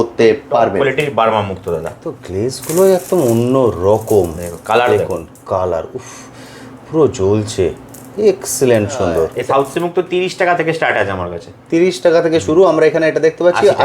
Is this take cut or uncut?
cut